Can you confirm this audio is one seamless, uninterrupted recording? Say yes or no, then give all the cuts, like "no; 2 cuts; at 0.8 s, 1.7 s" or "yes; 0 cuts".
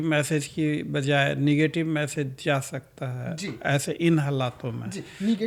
yes; 0 cuts